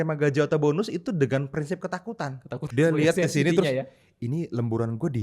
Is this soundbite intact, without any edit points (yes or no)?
no